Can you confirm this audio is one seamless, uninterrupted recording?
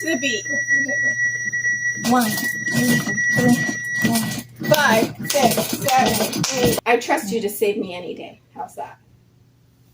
no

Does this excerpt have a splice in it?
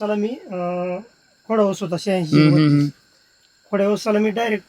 no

